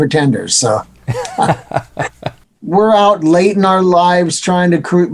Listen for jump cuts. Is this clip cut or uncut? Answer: cut